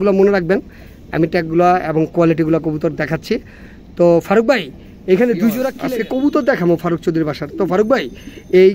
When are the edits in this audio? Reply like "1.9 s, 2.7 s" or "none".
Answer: 5.8 s